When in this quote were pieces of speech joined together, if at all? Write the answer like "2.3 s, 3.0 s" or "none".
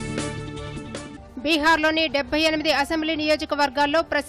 1.1 s